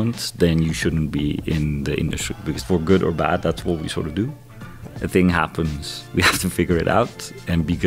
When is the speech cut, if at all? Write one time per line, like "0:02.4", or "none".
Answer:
0:02.6